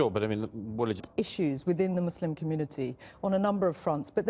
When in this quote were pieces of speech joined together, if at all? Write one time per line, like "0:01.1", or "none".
0:01.0